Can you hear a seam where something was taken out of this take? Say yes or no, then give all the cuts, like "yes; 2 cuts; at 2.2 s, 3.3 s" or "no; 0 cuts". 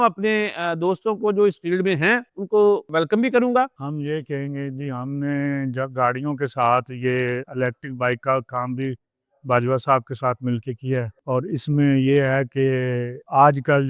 yes; 1 cut; at 3.9 s